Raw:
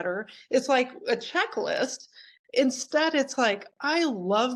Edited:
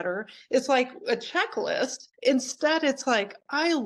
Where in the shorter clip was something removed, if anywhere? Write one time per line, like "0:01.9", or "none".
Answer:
0:02.1